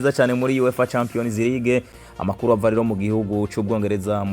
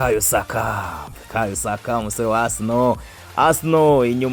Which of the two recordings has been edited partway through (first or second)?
first